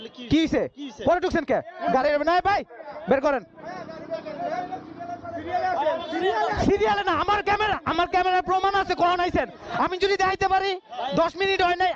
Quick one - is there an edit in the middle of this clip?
no; 0 cuts

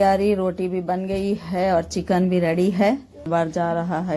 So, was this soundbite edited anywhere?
yes; 1 cut; at 3.3 s

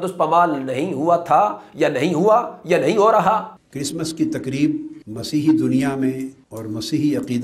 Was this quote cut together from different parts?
yes; 1 cut; at 3.5 s

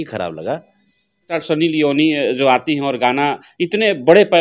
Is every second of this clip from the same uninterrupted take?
no; 1 cut; at 1.3 s

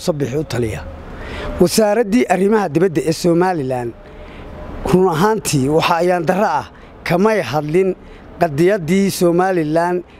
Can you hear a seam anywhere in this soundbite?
no; 0 cuts

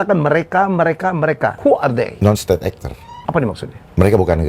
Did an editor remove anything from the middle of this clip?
yes; 2 cuts; at 1.7 s, 3.0 s

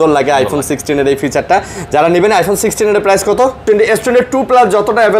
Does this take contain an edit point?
yes; 1 cut; at 3.6 s

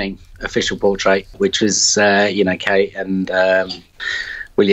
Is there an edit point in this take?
yes; 1 cut; at 1.3 s

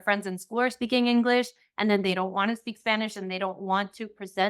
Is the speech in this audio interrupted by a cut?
no; 0 cuts

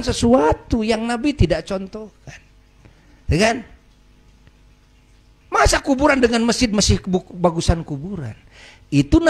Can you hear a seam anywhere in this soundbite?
no; 0 cuts

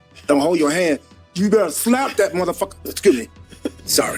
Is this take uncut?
yes; 0 cuts

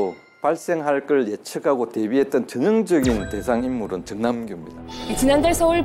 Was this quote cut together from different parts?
no; 0 cuts

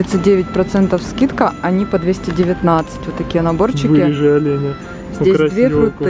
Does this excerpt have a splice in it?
no; 0 cuts

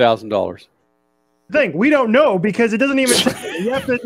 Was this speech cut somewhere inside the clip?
yes; 1 cut; at 1.5 s

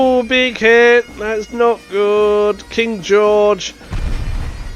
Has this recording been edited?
no; 0 cuts

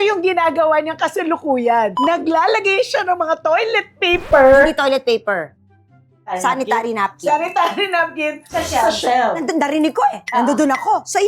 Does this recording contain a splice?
no; 0 cuts

